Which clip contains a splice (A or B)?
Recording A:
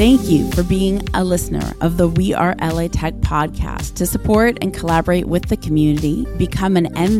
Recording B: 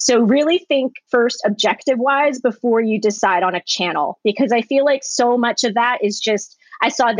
B